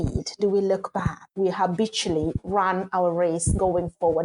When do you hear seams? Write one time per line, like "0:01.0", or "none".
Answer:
0:01.2

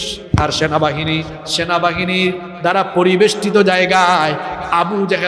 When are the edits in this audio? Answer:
none

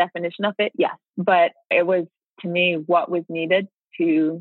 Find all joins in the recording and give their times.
0:01.1
0:01.7

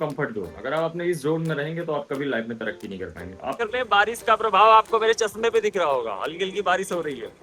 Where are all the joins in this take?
0:03.6

